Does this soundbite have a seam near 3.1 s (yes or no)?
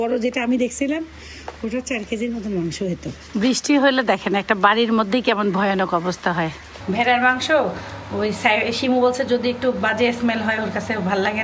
yes